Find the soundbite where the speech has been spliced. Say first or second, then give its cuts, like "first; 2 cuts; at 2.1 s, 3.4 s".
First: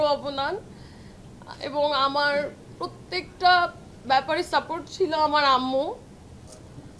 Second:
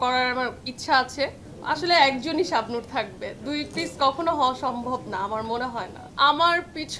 second; 2 cuts; at 1.5 s, 6.0 s